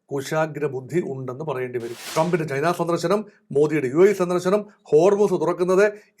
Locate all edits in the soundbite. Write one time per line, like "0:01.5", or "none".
0:02.0